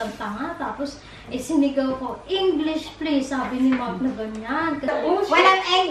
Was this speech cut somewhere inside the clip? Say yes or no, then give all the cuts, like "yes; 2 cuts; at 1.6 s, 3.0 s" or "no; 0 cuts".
yes; 1 cut; at 4.9 s